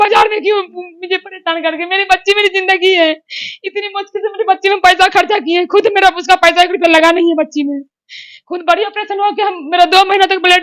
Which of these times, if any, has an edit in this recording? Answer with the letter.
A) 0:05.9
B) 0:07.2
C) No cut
C